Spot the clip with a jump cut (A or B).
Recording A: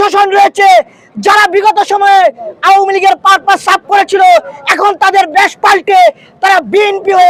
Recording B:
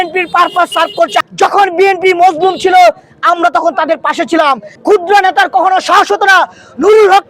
B